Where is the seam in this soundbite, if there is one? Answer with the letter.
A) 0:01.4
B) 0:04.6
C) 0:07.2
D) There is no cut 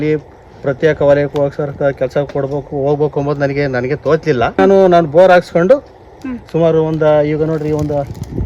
B